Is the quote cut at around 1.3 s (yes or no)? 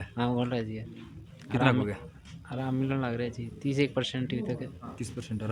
no